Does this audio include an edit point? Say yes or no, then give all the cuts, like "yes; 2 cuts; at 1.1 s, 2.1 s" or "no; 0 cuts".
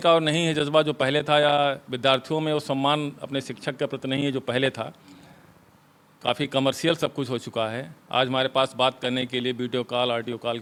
no; 0 cuts